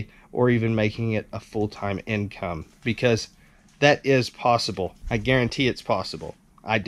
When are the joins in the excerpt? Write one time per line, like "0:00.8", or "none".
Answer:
0:05.0